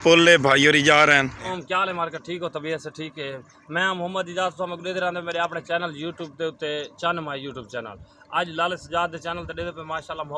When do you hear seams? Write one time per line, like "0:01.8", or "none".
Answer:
0:01.5